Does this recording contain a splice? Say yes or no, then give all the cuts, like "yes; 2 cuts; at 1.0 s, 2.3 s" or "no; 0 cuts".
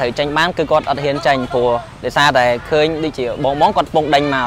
no; 0 cuts